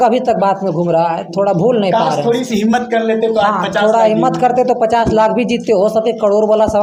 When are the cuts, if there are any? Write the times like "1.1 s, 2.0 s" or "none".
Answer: none